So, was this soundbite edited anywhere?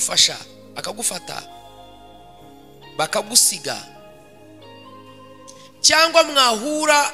no; 0 cuts

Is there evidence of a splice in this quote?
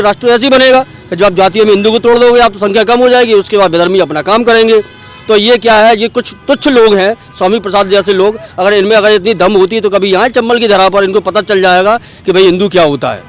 no; 0 cuts

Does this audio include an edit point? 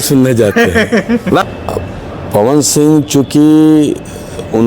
yes; 1 cut; at 1.4 s

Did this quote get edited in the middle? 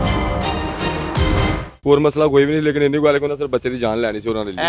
no; 0 cuts

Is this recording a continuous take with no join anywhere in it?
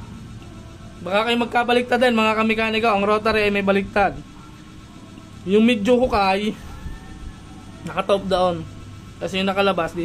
yes; 0 cuts

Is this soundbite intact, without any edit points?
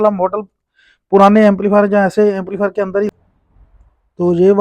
no; 1 cut; at 3.1 s

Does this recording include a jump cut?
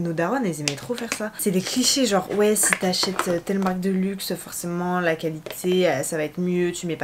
no; 0 cuts

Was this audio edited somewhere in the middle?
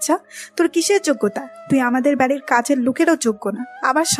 yes; 1 cut; at 1.5 s

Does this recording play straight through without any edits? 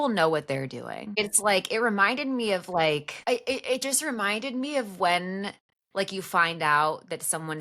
no; 2 cuts; at 1.1 s, 3.1 s

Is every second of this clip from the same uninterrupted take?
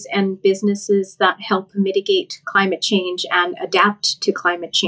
yes; 0 cuts

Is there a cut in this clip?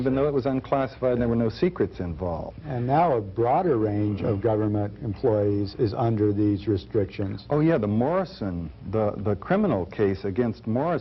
yes; 1 cut; at 9.9 s

